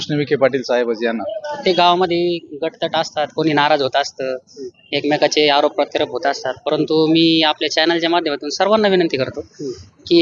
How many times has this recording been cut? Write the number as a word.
one